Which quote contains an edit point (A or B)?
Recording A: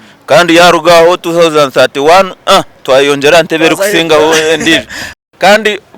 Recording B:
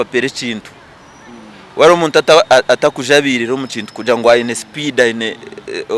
A